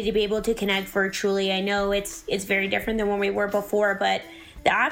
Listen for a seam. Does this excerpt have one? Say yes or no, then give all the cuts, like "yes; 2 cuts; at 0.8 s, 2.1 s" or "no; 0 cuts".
no; 0 cuts